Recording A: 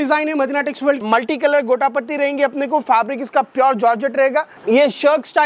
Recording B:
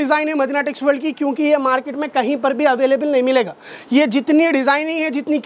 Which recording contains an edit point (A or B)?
A